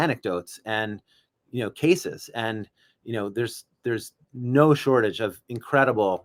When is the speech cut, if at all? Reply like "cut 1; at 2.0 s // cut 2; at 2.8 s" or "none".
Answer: none

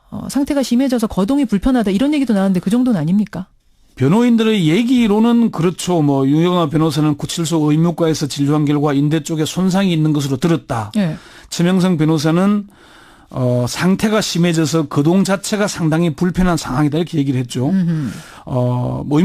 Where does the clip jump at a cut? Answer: cut 1; at 5.1 s

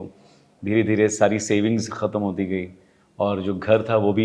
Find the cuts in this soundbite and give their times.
none

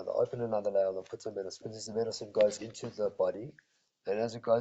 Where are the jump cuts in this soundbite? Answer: cut 1; at 1.7 s

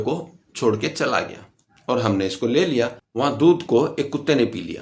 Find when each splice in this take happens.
cut 1; at 3.0 s

